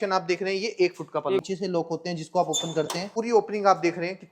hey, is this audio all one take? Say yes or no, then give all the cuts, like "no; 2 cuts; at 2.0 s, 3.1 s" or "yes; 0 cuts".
no; 2 cuts; at 1.4 s, 3.1 s